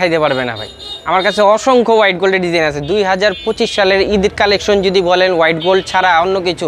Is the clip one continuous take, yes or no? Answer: yes